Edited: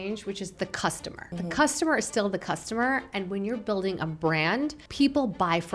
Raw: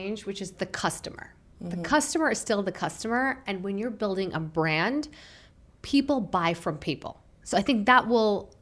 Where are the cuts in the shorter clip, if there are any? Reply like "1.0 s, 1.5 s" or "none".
1.1 s, 4.8 s